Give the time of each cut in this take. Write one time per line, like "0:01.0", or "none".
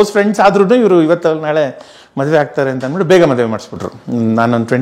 none